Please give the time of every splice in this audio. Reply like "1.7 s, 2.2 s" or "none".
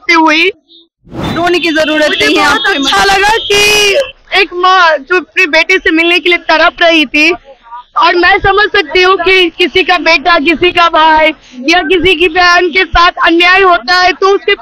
1.1 s